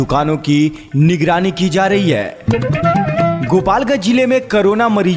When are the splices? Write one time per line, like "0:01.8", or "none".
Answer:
none